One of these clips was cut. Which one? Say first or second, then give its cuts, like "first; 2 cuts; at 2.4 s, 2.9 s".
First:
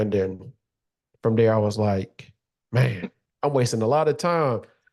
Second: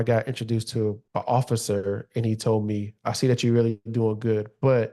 second; 1 cut; at 1.0 s